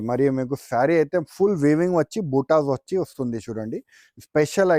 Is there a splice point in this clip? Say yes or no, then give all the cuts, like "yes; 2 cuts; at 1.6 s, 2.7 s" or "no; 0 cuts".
no; 0 cuts